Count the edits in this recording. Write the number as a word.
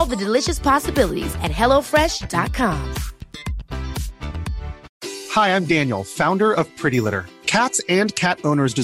one